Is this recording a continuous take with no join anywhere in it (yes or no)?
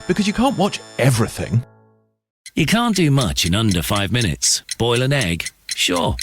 no